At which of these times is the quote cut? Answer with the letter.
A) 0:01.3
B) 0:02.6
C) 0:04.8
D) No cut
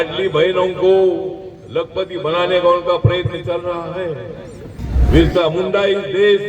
C